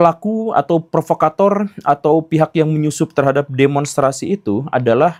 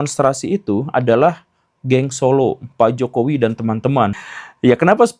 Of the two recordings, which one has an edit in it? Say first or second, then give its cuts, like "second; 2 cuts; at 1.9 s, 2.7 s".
second; 1 cut; at 4.1 s